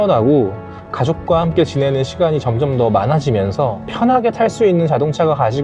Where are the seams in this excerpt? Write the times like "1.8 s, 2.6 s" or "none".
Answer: 3.8 s